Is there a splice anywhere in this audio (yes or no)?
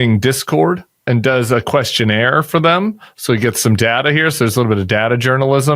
yes